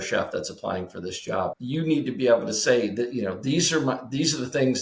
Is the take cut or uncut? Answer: cut